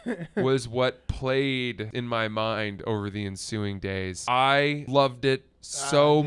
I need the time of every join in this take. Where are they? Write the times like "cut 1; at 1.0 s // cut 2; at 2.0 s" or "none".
cut 1; at 1.9 s // cut 2; at 4.2 s // cut 3; at 4.8 s